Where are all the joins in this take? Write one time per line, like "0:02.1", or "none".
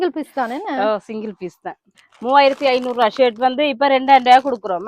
0:02.0